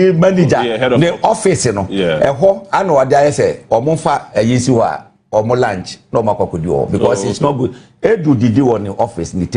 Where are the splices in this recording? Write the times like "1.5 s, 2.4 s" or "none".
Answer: 3.4 s

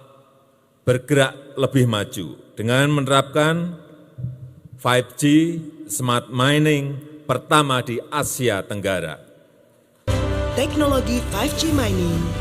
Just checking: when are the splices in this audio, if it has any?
10.1 s

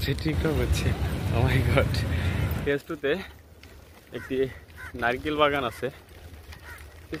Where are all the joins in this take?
2.6 s

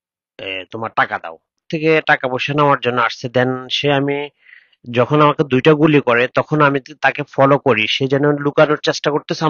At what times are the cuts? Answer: 1.6 s

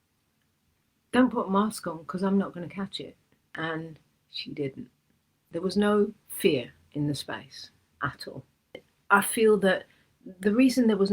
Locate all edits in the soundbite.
3.5 s, 5.5 s, 8.9 s

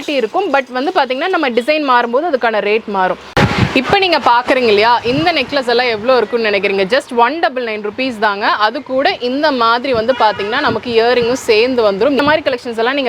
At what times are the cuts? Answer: 3.3 s, 12.2 s

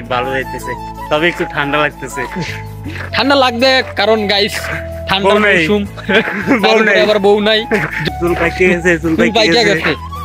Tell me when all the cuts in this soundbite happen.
8.0 s

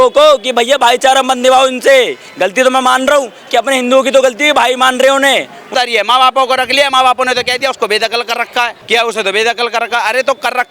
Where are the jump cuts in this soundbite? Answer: 5.6 s, 8.8 s

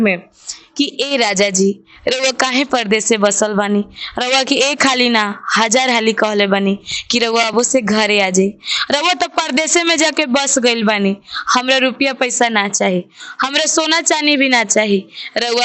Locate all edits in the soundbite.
none

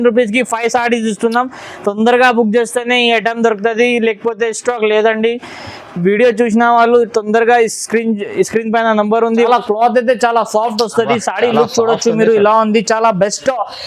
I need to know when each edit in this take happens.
9.5 s

